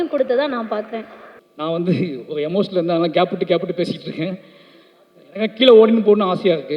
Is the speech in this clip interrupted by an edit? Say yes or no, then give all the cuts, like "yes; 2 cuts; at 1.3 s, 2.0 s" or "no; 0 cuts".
yes; 1 cut; at 1.5 s